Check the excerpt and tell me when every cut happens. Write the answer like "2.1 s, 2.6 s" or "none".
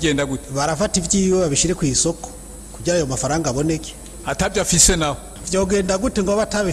5.3 s

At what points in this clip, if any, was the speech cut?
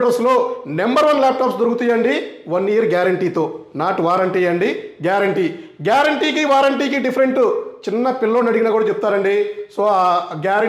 none

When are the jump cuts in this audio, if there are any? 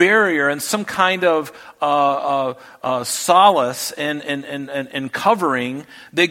none

